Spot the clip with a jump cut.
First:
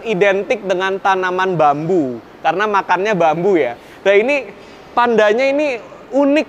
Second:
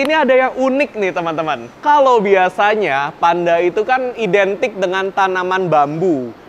second; 1 cut; at 1.7 s

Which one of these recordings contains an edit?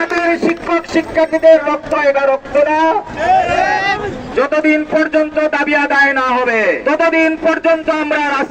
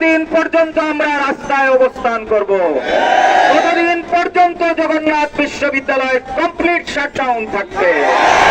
first; 1 cut; at 4.2 s

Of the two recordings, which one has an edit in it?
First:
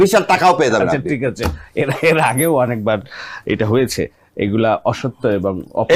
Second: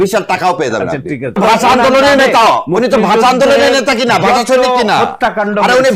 second; 1 cut; at 1.4 s

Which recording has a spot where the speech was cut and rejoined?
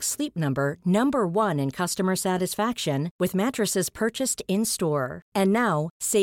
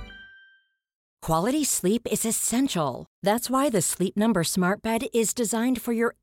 second; 1 cut; at 1.1 s

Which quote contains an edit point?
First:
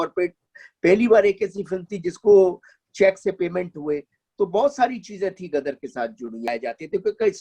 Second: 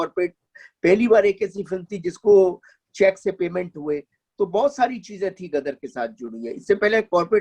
first; 1 cut; at 6.5 s

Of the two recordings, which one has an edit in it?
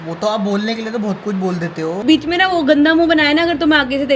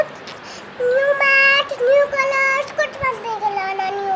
first; 1 cut; at 2.0 s

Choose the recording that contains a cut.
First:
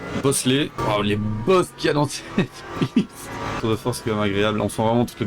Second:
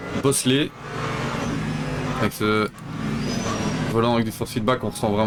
first; 2 cuts; at 0.8 s, 3.6 s

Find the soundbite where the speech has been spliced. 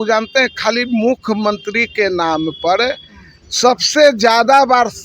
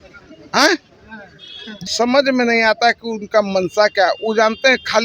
second; 1 cut; at 1.7 s

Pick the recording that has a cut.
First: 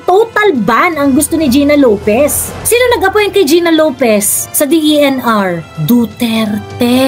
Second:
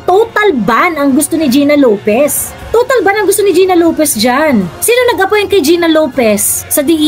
first; 1 cut; at 2.6 s

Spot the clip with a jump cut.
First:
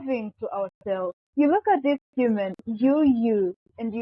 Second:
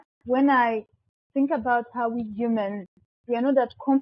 first; 1 cut; at 1.2 s

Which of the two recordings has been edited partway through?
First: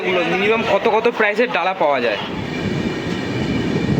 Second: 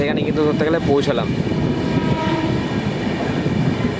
first; 1 cut; at 2.4 s

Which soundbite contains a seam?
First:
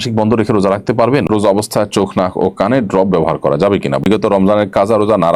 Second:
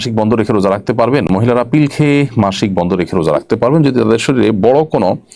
first; 2 cuts; at 1.3 s, 4.1 s

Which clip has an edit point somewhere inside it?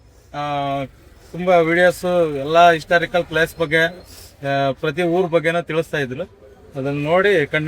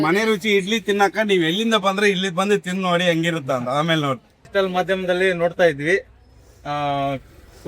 second; 1 cut; at 4.4 s

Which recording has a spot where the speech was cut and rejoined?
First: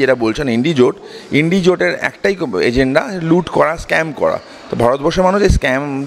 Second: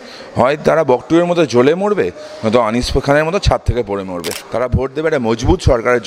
second; 1 cut; at 4.4 s

